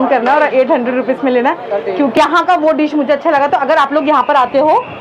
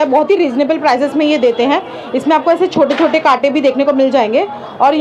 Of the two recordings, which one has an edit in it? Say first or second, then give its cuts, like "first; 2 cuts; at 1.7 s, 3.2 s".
first; 1 cut; at 2.2 s